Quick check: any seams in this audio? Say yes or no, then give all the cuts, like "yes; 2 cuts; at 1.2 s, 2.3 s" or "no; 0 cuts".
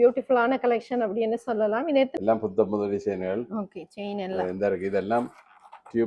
yes; 1 cut; at 2.1 s